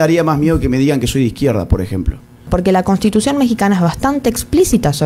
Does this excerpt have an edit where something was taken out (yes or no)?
yes